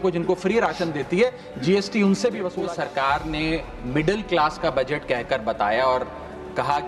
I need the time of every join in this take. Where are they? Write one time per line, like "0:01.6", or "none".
0:02.5